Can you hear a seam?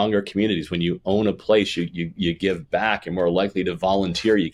no; 0 cuts

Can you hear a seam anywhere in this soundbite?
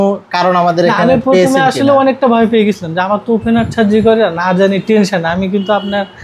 no; 0 cuts

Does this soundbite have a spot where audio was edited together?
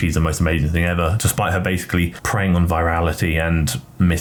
no; 0 cuts

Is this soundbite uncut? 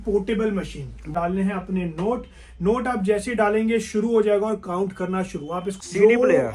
no; 2 cuts; at 1.0 s, 5.7 s

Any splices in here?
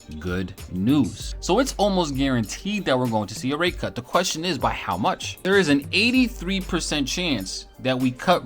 yes; 2 cuts; at 1.3 s, 5.3 s

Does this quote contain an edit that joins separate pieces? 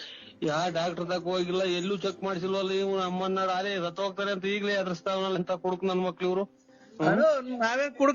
no; 0 cuts

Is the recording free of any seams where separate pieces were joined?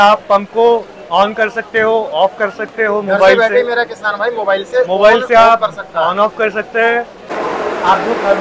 no; 1 cut; at 7.3 s

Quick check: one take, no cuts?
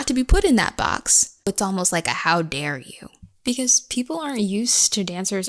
yes; 0 cuts

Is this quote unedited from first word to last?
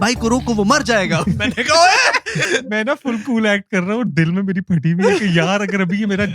no; 1 cut; at 2.4 s

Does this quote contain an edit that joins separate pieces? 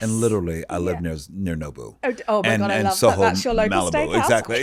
no; 0 cuts

